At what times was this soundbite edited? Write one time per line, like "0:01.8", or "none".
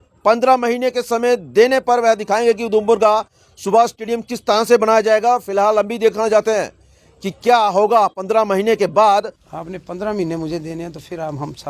0:09.4